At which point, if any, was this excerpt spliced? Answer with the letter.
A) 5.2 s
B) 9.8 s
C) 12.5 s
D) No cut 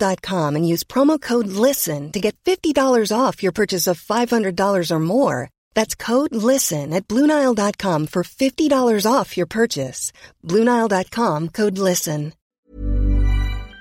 C